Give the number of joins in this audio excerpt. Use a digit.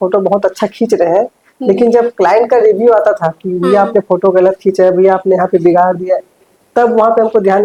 0